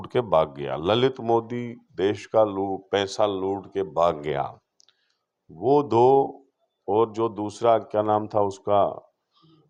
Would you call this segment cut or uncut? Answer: uncut